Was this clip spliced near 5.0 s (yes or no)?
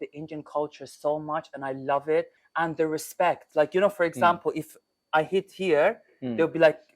no